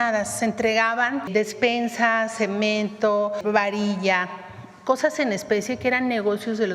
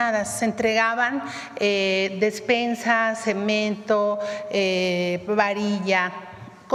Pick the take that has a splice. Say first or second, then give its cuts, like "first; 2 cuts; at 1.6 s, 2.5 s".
first; 2 cuts; at 1.3 s, 3.4 s